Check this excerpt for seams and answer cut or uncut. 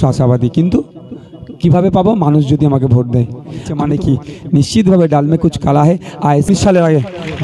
cut